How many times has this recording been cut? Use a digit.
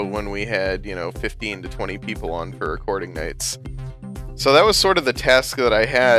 1